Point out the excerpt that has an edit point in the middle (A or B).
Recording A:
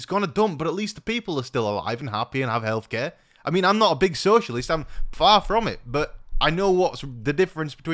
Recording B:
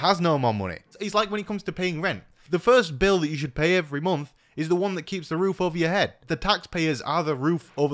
B